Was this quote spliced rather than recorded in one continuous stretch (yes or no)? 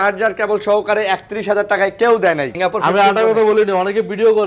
yes